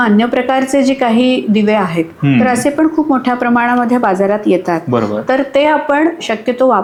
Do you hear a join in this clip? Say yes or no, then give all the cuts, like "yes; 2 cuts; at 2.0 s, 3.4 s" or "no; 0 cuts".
no; 0 cuts